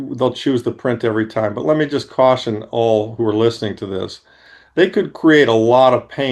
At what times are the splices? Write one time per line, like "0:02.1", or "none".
none